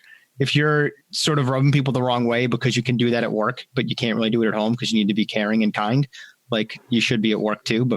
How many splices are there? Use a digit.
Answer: 0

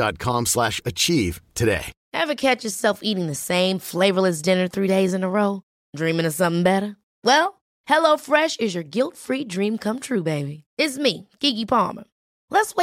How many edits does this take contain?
1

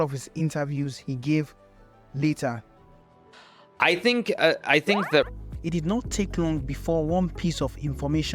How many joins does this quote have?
1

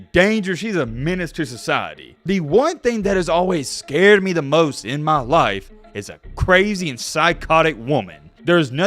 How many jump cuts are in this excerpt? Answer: 1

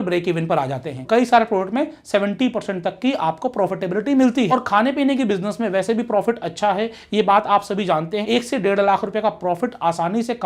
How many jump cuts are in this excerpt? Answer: 3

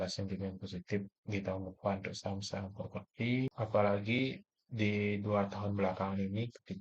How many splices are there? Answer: 1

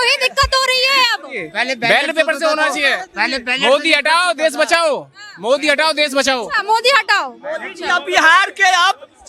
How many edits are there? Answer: 0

